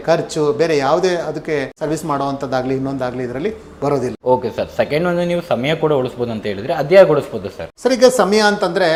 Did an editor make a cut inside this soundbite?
no; 0 cuts

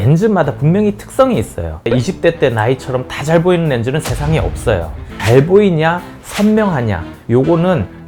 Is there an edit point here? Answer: yes; 2 cuts; at 1.9 s, 5.1 s

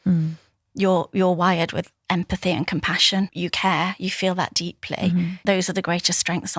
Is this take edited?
yes; 2 cuts; at 3.3 s, 5.4 s

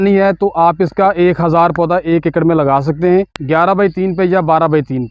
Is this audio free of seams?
yes; 0 cuts

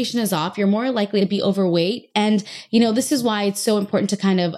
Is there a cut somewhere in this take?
yes; 1 cut; at 1.2 s

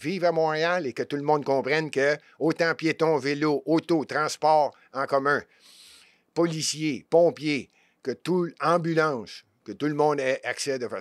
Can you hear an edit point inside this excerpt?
no; 0 cuts

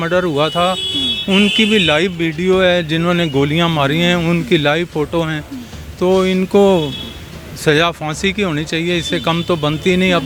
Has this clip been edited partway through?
no; 0 cuts

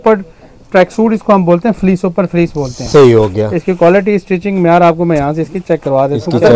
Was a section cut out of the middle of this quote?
no; 0 cuts

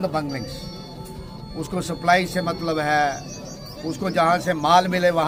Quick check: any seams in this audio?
no; 0 cuts

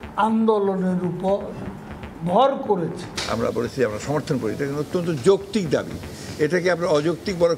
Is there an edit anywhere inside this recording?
yes; 1 cut; at 3.1 s

